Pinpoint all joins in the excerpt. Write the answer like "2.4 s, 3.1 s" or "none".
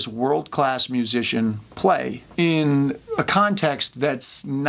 none